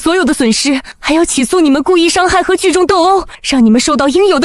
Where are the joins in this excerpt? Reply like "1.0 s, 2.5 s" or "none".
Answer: 0.9 s, 3.4 s